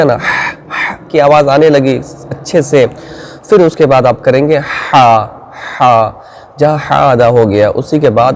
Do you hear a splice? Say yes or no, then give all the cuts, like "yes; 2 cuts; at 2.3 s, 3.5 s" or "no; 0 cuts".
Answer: no; 0 cuts